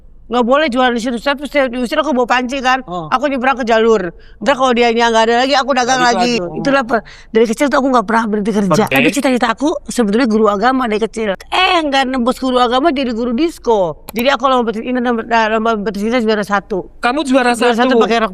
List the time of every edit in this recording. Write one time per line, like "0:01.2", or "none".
0:06.4
0:08.9
0:11.4
0:14.0